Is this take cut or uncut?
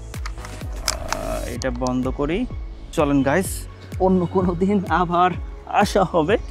cut